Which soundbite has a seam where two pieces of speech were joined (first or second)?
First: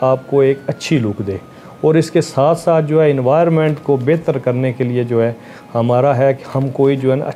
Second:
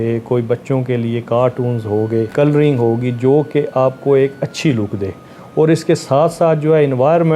second